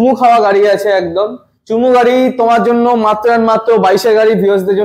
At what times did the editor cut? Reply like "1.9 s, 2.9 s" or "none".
none